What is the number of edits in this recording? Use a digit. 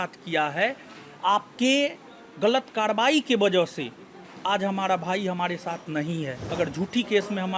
1